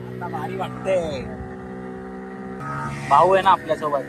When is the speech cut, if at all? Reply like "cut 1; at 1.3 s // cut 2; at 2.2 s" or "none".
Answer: cut 1; at 2.6 s